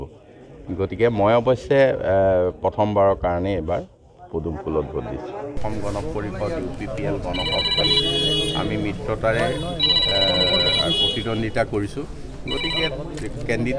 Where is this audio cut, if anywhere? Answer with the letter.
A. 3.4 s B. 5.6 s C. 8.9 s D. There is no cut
B